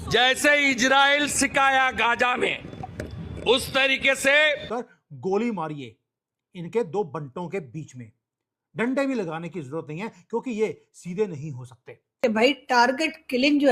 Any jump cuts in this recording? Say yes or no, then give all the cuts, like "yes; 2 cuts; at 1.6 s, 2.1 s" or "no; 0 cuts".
yes; 2 cuts; at 4.7 s, 12.2 s